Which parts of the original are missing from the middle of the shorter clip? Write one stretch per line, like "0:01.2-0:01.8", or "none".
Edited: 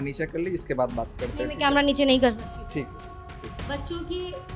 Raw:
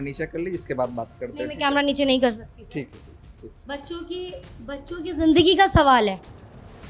none